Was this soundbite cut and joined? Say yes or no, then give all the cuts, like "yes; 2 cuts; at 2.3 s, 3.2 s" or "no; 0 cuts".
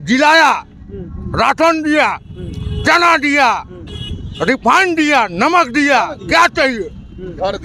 no; 0 cuts